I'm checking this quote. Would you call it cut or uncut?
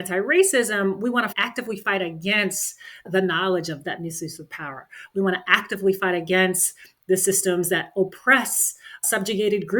cut